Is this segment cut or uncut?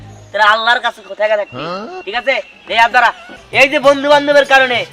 cut